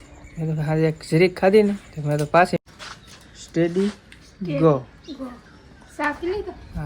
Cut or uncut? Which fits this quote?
cut